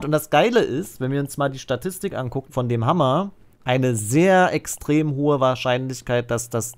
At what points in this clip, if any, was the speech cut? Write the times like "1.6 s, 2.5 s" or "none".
2.5 s, 3.5 s